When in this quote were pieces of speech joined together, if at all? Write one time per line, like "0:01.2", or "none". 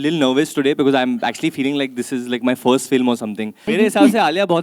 0:03.7